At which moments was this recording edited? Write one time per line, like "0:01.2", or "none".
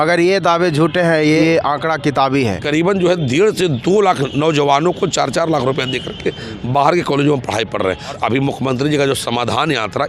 0:01.4
0:02.6
0:08.2